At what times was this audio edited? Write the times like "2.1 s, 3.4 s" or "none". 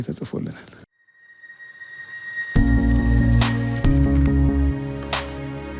none